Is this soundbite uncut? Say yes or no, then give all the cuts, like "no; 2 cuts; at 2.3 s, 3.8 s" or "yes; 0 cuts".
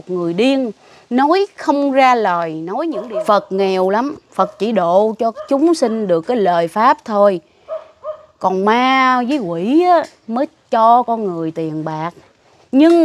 no; 1 cut; at 3.0 s